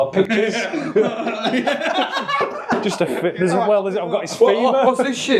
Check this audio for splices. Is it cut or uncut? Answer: uncut